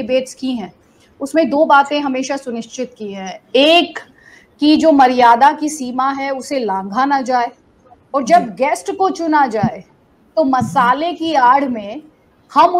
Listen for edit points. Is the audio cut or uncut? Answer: uncut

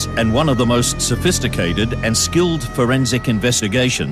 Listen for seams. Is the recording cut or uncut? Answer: uncut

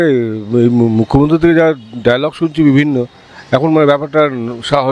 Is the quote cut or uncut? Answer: uncut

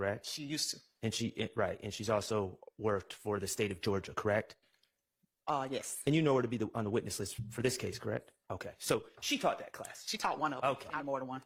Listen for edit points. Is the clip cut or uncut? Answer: uncut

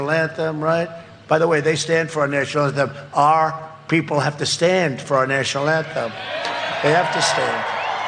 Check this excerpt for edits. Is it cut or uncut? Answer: uncut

